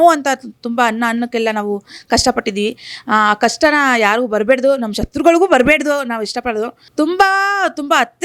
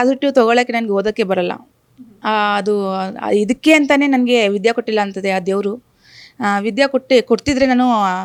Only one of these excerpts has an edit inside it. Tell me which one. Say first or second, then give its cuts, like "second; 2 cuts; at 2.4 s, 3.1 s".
first; 1 cut; at 6.8 s